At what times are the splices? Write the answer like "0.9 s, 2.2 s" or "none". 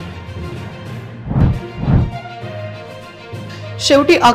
1.1 s